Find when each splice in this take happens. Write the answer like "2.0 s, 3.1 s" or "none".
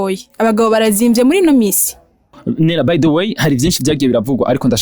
2.4 s